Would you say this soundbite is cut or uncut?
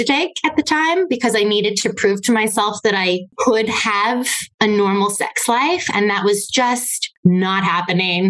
uncut